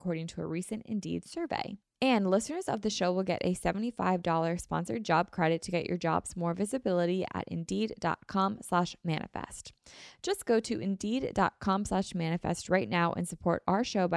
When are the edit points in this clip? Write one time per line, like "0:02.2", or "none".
0:01.8